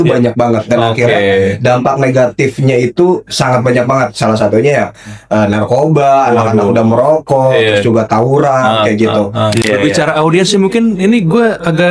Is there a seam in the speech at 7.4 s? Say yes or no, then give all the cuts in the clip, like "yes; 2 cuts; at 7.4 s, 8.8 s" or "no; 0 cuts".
no; 1 cut; at 9.6 s